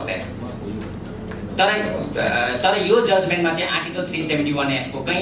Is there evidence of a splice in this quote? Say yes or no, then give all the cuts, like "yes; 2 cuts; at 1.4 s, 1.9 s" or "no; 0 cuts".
no; 0 cuts